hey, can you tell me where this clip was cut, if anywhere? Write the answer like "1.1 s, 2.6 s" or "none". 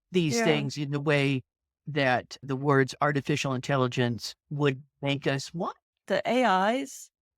6.0 s